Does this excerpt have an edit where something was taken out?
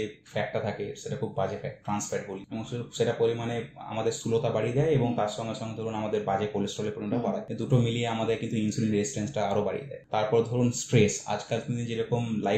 yes; 3 cuts; at 2.4 s, 7.5 s, 9.9 s

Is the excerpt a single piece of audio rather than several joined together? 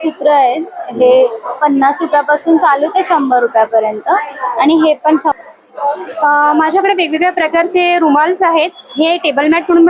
no; 1 cut; at 5.3 s

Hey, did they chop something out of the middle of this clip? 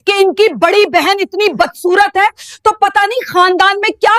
no; 0 cuts

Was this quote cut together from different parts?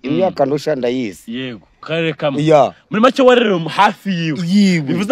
yes; 1 cut; at 1.8 s

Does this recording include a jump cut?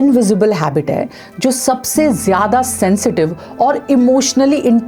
no; 0 cuts

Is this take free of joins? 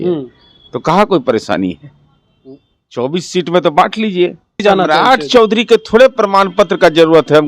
no; 1 cut; at 4.6 s

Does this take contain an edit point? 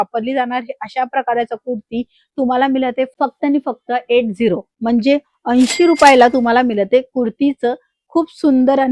no; 0 cuts

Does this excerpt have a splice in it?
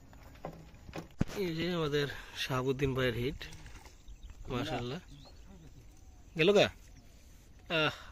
yes; 1 cut; at 1.1 s

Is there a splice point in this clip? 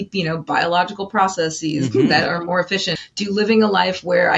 yes; 1 cut; at 2.9 s

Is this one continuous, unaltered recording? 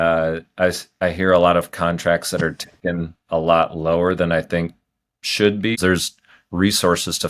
no; 1 cut; at 5.8 s

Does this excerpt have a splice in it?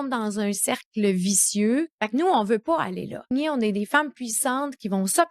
yes; 2 cuts; at 1.9 s, 3.3 s

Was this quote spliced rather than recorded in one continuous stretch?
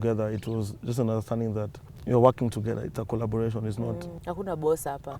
yes; 2 cuts; at 1.8 s, 4.1 s

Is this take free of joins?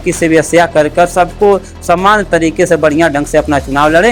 yes; 0 cuts

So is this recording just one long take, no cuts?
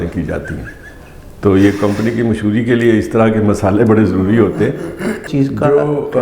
no; 1 cut; at 5.3 s

